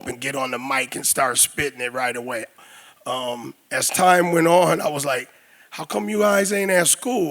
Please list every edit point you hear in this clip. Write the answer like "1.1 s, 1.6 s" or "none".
2.6 s